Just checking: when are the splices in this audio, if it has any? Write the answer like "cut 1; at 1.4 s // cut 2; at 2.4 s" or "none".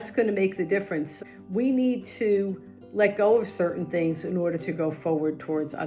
cut 1; at 1.0 s